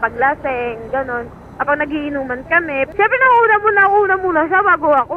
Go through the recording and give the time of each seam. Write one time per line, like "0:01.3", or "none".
0:02.9